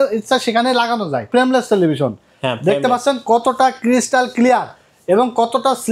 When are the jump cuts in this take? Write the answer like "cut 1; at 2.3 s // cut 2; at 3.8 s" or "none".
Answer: cut 1; at 1.3 s